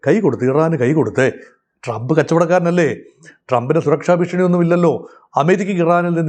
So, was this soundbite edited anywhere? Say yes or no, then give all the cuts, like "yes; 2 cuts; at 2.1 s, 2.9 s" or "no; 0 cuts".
no; 0 cuts